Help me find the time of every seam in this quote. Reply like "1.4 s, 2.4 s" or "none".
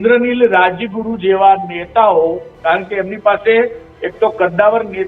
none